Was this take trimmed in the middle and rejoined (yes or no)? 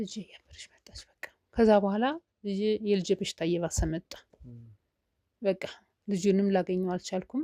no